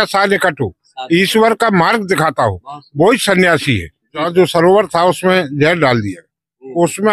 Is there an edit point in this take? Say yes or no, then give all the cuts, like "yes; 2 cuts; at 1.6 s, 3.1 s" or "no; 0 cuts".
yes; 1 cut; at 4.3 s